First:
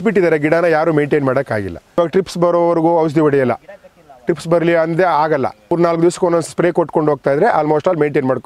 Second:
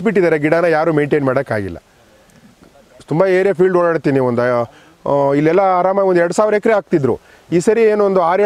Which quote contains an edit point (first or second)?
first